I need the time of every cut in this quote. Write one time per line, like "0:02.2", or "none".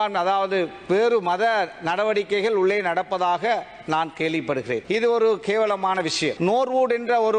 0:06.3